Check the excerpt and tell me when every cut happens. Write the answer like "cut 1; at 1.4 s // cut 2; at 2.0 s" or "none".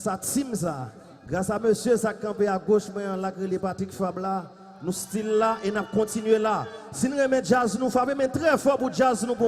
cut 1; at 5.7 s